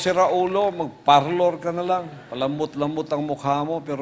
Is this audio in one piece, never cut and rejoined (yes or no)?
no